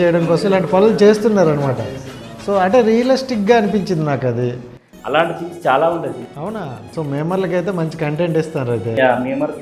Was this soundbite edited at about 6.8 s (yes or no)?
yes